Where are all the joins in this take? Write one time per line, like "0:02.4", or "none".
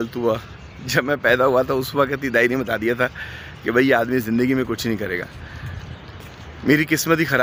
none